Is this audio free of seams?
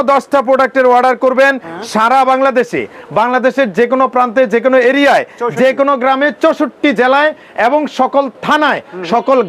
yes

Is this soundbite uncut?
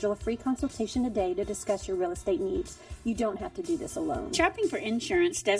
no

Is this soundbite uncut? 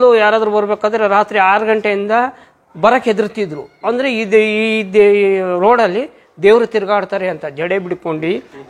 yes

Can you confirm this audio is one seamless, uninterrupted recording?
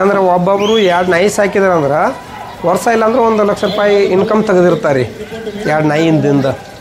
yes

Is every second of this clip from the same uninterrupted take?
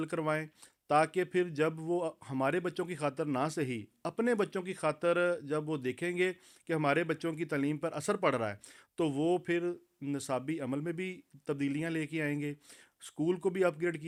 yes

